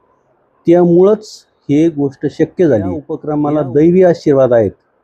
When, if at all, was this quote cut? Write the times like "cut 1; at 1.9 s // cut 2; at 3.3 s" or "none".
cut 1; at 3.2 s